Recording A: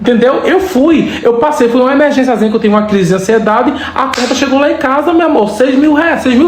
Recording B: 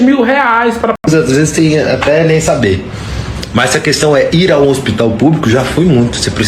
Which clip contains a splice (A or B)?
B